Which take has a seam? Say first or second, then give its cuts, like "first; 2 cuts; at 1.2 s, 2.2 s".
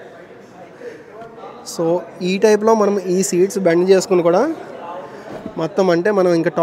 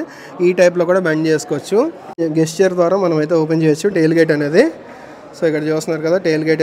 second; 1 cut; at 2.0 s